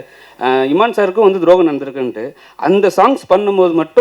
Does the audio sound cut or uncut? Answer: uncut